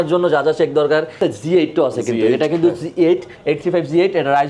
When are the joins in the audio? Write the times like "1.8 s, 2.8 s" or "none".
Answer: 1.2 s